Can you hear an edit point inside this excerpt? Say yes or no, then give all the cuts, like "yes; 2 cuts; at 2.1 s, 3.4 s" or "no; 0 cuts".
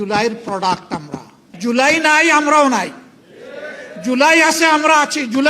yes; 1 cut; at 1.5 s